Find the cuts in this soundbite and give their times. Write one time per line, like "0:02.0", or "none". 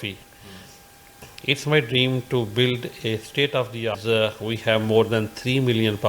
0:03.9